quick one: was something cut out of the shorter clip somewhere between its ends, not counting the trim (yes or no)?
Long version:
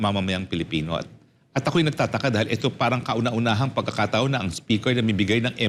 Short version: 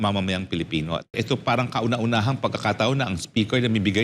yes